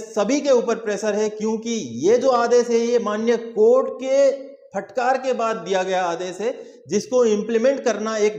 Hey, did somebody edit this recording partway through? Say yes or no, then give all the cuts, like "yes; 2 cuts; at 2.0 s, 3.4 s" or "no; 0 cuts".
no; 0 cuts